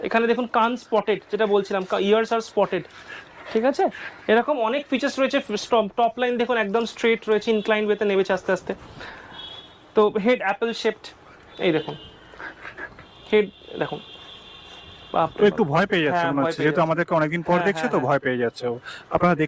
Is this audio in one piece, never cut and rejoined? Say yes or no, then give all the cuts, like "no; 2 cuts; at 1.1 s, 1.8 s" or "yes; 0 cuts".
yes; 0 cuts